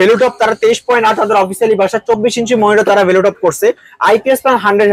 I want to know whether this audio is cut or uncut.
uncut